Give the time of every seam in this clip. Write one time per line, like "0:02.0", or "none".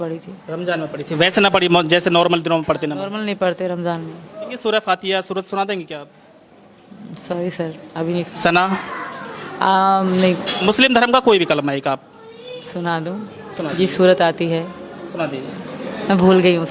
0:04.5
0:10.5